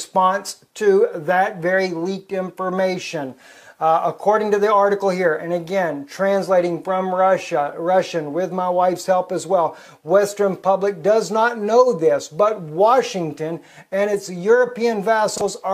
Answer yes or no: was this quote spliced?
no